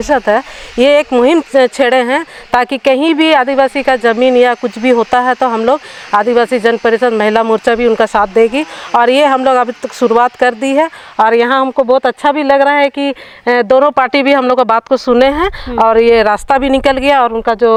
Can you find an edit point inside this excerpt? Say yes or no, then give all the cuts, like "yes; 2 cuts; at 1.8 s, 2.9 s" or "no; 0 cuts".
no; 0 cuts